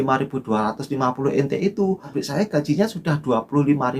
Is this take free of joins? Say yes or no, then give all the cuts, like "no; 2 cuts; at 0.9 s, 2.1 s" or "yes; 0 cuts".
no; 1 cut; at 2.1 s